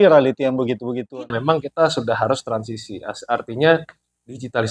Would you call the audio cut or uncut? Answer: cut